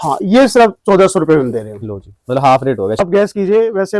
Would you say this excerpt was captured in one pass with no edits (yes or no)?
no